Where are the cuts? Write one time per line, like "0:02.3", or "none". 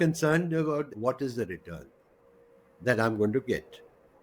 0:00.9